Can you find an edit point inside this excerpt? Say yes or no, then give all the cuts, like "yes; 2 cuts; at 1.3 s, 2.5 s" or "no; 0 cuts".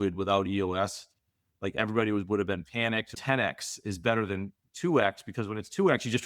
yes; 1 cut; at 3.2 s